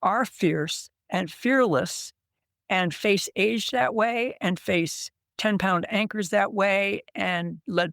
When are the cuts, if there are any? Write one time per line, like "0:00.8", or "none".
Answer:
none